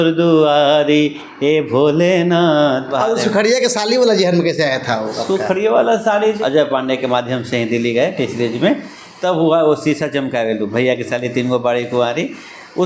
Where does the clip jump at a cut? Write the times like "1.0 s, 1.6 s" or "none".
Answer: 2.9 s, 6.4 s